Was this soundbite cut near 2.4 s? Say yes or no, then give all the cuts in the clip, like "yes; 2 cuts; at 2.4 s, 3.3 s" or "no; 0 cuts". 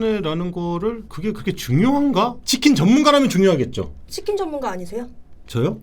yes; 1 cut; at 2.4 s